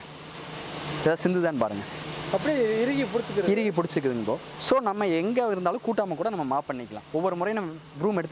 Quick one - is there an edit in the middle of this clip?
no; 0 cuts

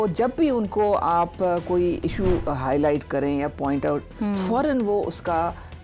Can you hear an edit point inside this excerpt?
no; 0 cuts

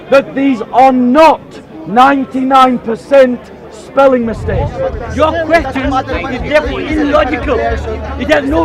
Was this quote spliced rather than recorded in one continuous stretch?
yes; 1 cut; at 4.7 s

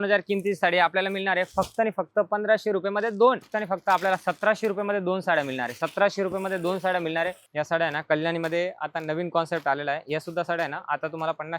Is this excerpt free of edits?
no; 2 cuts; at 3.5 s, 7.4 s

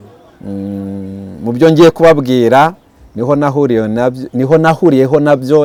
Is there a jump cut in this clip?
no; 0 cuts

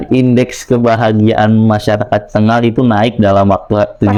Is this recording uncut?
yes; 0 cuts

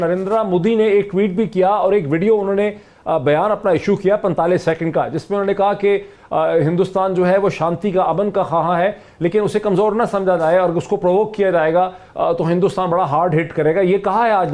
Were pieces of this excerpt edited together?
no; 0 cuts

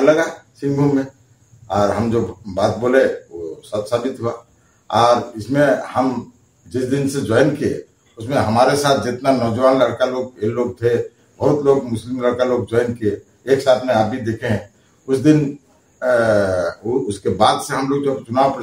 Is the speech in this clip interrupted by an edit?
no; 0 cuts

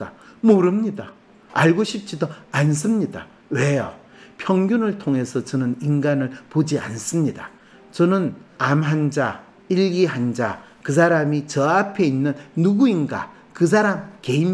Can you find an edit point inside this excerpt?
yes; 1 cut; at 8.5 s

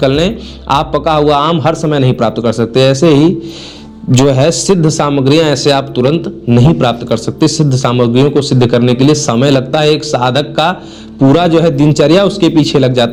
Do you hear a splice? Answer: no; 0 cuts

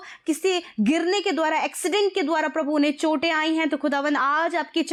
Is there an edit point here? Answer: no; 0 cuts

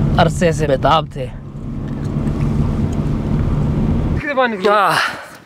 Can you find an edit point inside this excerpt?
yes; 1 cut; at 4.2 s

